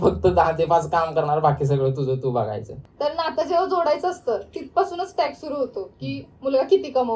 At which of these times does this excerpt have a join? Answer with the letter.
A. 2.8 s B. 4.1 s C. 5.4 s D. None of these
A